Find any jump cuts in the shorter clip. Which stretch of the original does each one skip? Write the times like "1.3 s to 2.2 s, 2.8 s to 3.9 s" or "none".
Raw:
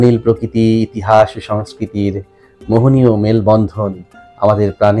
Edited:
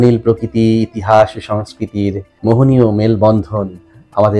2.3 s to 2.5 s